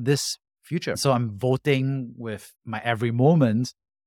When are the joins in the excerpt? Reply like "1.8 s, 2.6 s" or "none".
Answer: 1.0 s